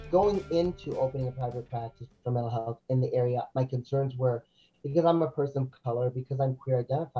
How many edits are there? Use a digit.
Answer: 0